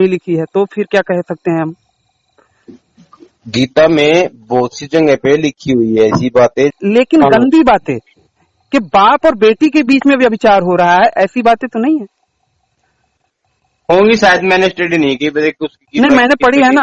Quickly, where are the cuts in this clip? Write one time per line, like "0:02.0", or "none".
0:06.8